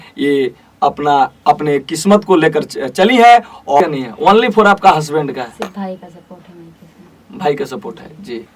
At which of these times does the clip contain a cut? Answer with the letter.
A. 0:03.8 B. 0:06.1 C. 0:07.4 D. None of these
A